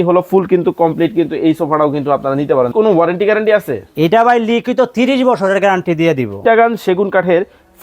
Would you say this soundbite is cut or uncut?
cut